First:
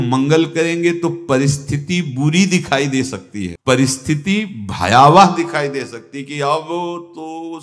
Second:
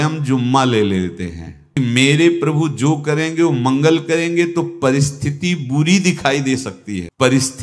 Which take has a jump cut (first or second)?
second